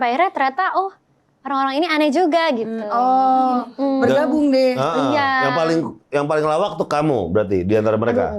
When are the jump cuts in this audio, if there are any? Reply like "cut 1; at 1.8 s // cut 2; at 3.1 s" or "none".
none